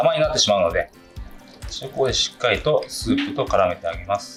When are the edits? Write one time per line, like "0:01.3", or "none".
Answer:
none